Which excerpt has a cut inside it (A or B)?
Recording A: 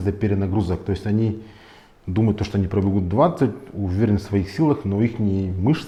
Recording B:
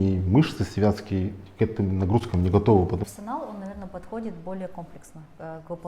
B